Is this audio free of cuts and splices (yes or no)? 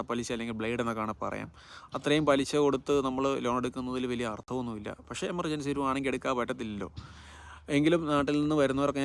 yes